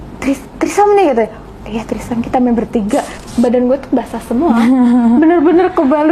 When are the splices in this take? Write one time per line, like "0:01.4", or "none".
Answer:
0:03.1